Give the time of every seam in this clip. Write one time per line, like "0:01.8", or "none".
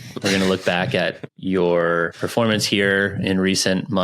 0:01.3
0:02.2